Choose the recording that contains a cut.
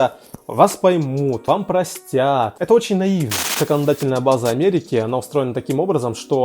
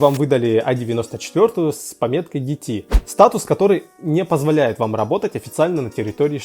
first; 3 cuts; at 1.4 s, 2.5 s, 3.5 s

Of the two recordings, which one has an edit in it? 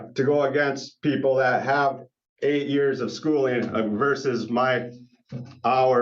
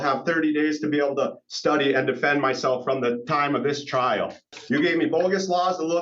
second; 1 cut; at 4.5 s

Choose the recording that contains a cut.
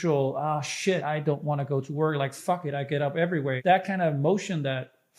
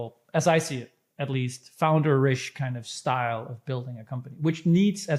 first; 2 cuts; at 1.0 s, 3.6 s

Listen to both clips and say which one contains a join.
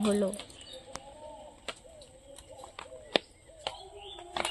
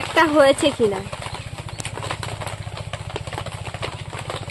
first; 1 cut; at 3.5 s

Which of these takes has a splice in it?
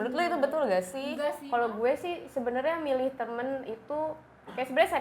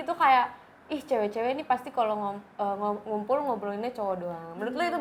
first; 1 cut; at 1.4 s

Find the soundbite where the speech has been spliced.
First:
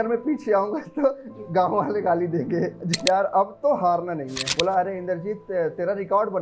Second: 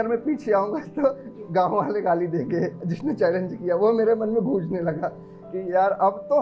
first; 2 cuts; at 3.0 s, 4.4 s

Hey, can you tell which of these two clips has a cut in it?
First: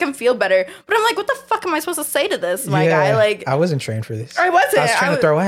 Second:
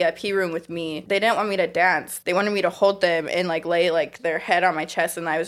second; 2 cuts; at 1.0 s, 2.1 s

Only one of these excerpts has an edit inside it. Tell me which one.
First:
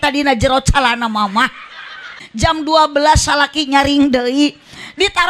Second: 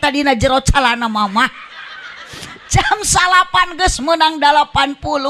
first; 1 cut; at 2.2 s

